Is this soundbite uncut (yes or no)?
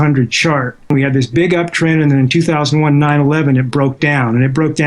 no